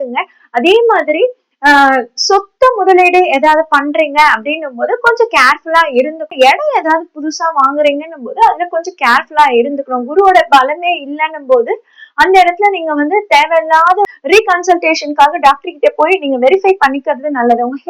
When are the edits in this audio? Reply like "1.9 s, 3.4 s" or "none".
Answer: 6.3 s, 14.1 s